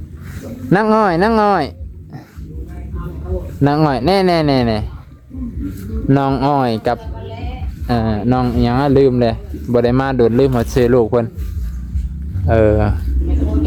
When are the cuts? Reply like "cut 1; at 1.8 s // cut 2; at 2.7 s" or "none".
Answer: none